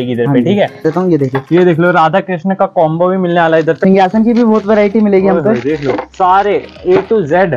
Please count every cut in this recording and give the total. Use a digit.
2